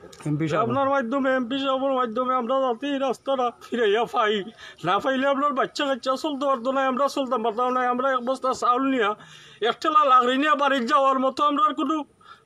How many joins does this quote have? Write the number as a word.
zero